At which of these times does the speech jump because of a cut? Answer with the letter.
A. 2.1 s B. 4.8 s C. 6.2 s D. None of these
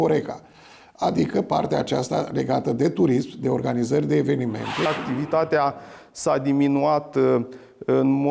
B